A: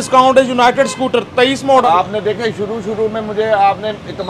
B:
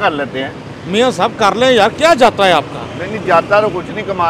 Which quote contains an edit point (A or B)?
A